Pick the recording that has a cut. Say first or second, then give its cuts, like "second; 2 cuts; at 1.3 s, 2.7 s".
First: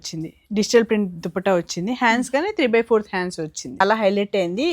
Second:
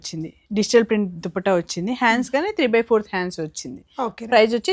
first; 1 cut; at 3.8 s